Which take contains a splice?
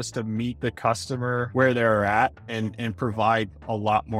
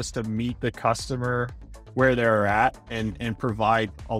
first; 1 cut; at 1.5 s

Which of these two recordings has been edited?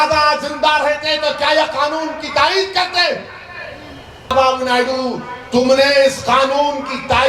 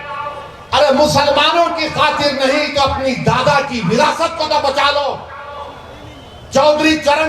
first; 1 cut; at 4.3 s

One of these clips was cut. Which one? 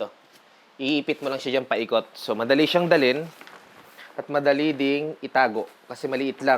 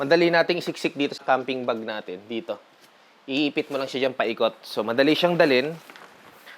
second; 1 cut; at 1.2 s

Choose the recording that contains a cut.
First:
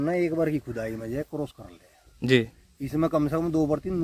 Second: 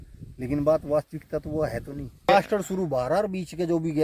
second; 1 cut; at 2.3 s

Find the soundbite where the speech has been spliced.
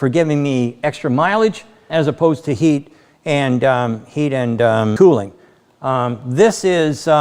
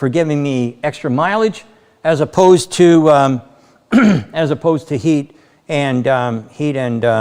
first; 2 cuts; at 1.8 s, 5.0 s

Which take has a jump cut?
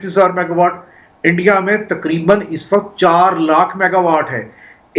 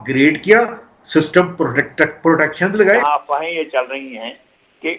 second; 1 cut; at 3.0 s

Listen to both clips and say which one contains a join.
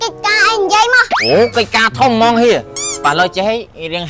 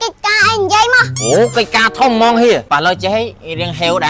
second; 1 cut; at 2.6 s

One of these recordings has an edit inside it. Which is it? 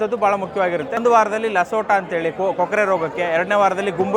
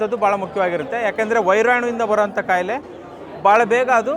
first; 1 cut; at 1.0 s

